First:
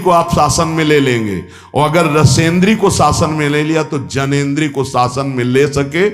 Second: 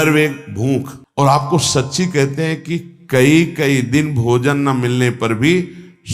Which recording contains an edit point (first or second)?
second